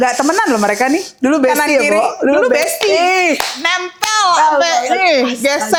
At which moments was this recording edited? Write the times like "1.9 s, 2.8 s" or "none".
none